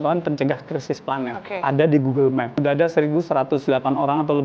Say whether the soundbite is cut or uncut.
cut